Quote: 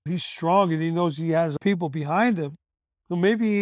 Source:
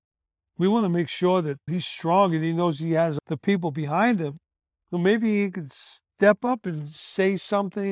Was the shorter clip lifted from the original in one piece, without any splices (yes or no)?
no